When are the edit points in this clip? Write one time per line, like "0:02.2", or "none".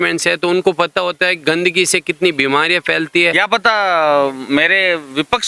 0:03.4